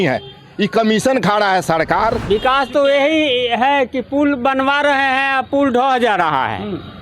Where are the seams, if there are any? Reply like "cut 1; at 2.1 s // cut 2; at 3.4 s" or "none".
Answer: cut 1; at 2.2 s